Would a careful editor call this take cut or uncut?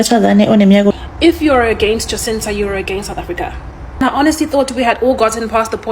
cut